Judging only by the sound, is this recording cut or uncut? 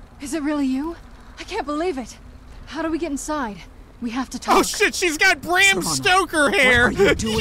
cut